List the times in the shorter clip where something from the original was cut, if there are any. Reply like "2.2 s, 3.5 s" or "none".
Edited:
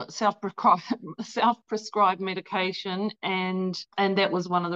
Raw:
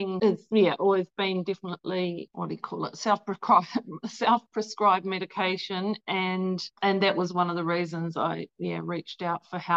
none